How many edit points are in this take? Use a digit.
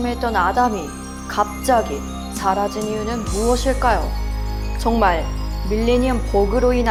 0